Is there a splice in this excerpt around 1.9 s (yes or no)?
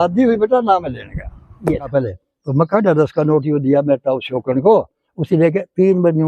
yes